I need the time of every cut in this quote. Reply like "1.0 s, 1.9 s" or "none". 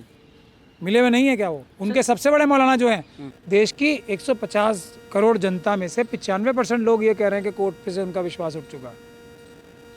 3.2 s